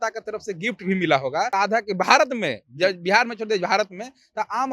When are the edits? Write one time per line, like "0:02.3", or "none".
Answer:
0:01.5